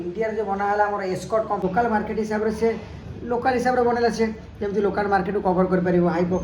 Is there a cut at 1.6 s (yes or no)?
yes